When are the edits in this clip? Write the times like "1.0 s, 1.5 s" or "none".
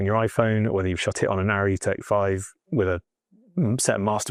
none